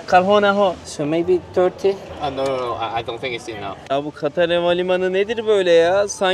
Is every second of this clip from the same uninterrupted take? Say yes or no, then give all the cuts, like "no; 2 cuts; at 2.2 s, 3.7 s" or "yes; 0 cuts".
no; 2 cuts; at 0.9 s, 3.8 s